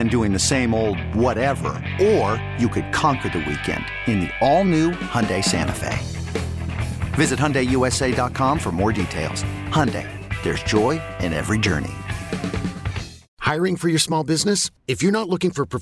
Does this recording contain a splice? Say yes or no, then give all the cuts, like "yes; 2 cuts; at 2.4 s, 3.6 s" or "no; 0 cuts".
yes; 1 cut; at 13.2 s